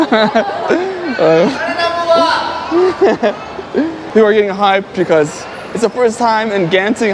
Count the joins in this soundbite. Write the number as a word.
one